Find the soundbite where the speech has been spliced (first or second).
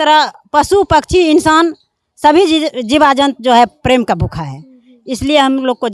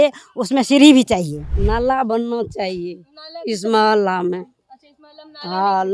second